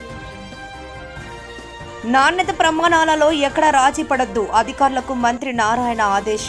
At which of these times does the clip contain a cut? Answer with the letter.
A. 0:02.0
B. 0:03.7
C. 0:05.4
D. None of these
A